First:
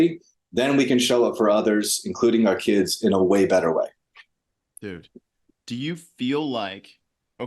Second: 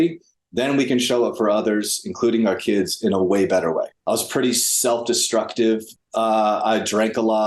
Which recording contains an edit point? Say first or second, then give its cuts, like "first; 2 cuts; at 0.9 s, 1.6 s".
second; 2 cuts; at 3.9 s, 6.0 s